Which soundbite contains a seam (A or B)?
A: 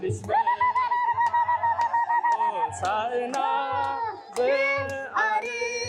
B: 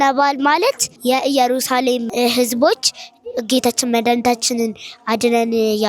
B